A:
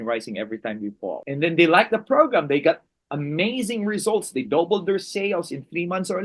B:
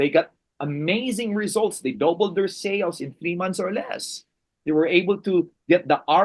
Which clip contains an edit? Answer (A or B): A